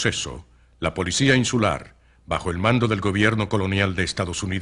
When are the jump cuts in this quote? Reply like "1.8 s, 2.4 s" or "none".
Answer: none